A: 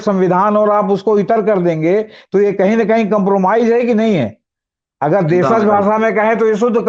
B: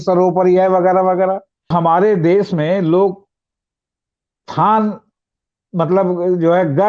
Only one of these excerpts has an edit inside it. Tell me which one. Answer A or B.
B